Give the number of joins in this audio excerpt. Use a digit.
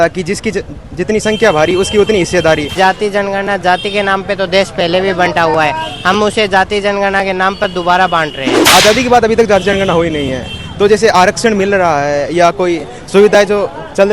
2